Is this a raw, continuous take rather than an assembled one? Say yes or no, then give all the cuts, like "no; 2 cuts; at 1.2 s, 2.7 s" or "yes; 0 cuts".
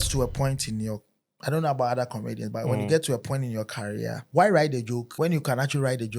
no; 2 cuts; at 4.2 s, 5.1 s